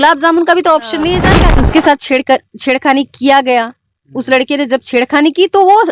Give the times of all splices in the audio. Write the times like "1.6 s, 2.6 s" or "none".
1.3 s